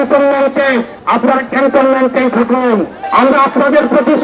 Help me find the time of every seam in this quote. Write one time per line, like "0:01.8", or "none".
0:01.0
0:03.0